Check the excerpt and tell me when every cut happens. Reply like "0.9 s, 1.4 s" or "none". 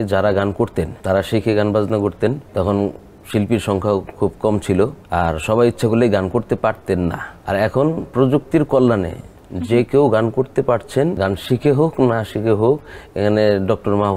1.0 s, 2.4 s, 5.0 s, 7.3 s, 11.2 s